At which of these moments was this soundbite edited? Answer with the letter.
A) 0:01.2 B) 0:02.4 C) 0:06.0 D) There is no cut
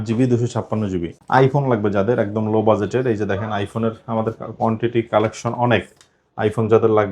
A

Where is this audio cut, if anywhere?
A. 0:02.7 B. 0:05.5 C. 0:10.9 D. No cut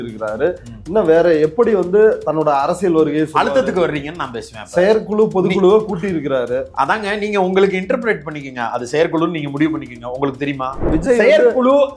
C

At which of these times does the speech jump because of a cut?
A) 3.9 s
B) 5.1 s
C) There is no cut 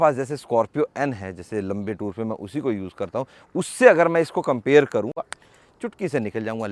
B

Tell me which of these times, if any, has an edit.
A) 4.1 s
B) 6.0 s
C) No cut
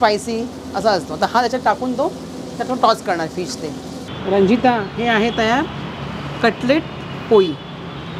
A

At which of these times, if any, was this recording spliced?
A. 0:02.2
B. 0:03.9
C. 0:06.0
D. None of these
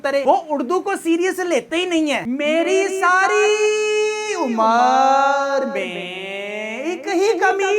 A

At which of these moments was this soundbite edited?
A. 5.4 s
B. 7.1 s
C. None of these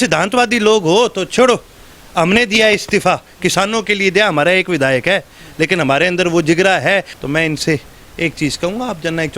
B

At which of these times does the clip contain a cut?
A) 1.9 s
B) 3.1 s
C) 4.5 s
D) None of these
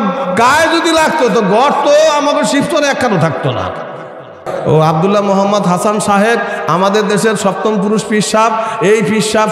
C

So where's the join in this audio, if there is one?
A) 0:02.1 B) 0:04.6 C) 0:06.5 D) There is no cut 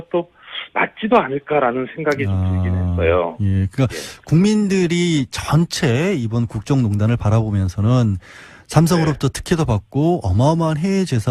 C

